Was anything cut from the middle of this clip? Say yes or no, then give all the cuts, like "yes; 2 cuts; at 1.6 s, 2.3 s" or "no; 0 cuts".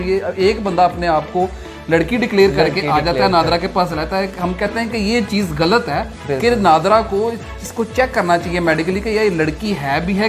no; 0 cuts